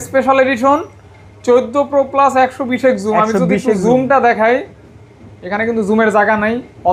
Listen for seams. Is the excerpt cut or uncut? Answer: uncut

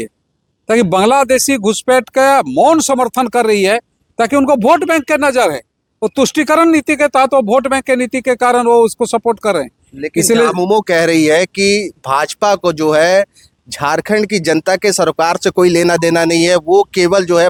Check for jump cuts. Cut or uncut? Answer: uncut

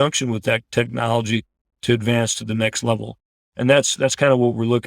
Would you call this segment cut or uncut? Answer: cut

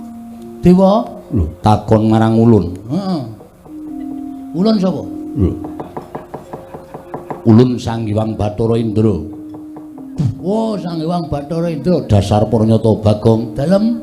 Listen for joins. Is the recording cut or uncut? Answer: cut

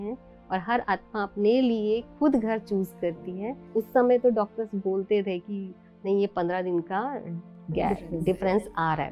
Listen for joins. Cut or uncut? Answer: cut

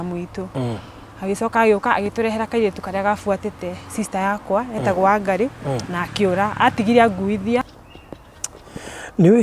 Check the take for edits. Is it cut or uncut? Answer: cut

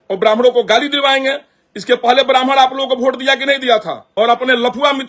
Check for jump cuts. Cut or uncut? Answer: cut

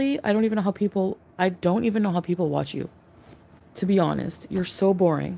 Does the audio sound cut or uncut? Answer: uncut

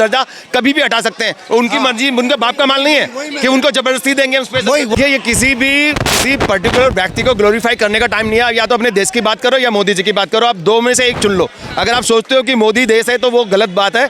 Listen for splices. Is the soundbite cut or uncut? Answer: cut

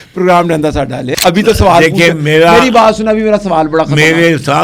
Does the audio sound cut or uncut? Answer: cut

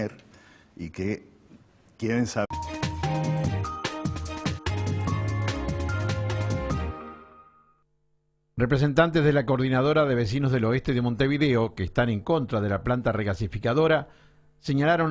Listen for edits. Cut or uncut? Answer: uncut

